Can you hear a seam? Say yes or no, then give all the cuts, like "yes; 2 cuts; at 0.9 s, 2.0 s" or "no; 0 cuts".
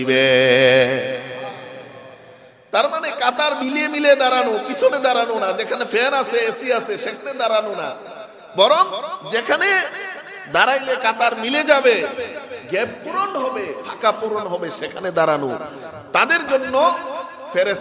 no; 0 cuts